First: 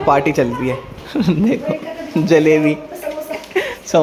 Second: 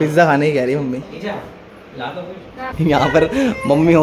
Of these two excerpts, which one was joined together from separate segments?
second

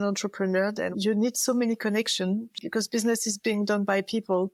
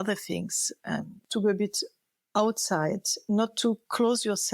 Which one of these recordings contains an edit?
second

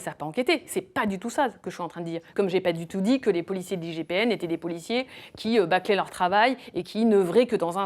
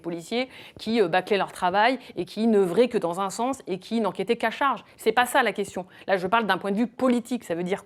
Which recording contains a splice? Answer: first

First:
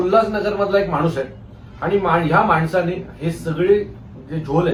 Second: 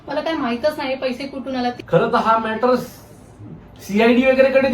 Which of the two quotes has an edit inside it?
second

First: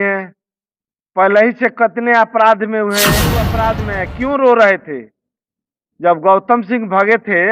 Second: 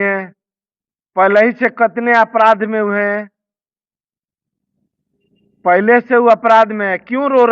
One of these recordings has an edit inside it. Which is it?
first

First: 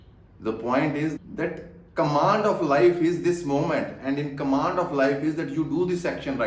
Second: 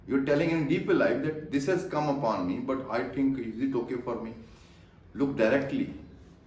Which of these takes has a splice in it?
first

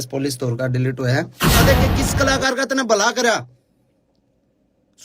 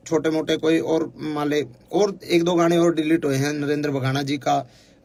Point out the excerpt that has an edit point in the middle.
first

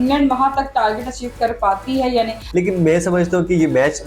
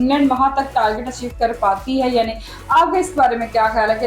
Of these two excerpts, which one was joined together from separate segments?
first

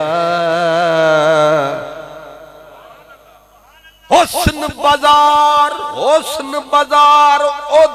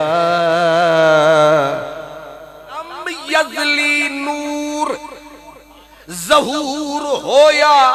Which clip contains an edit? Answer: second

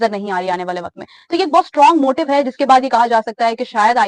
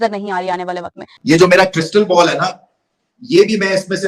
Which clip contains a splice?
second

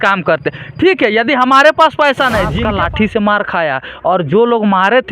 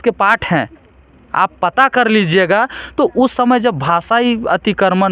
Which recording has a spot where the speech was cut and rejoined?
first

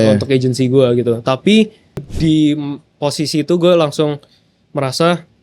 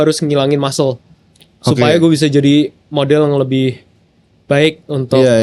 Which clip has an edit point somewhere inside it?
first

